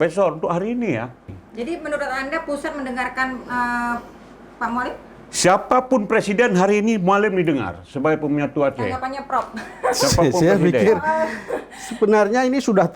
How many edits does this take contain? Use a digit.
1